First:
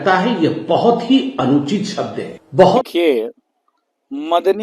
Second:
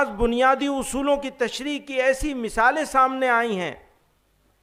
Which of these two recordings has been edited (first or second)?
first